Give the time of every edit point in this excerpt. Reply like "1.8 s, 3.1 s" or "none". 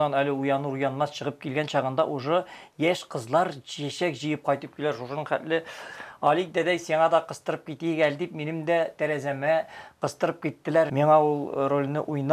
10.9 s